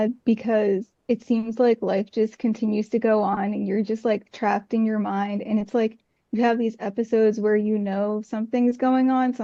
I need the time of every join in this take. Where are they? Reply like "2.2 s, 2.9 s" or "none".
none